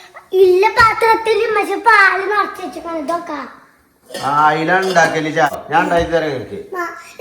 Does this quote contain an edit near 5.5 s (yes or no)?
yes